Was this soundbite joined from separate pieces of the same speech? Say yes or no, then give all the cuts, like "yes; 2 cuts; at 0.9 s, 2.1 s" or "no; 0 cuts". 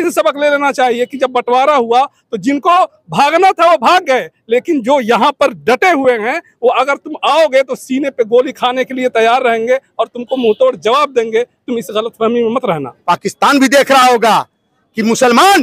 yes; 1 cut; at 12.9 s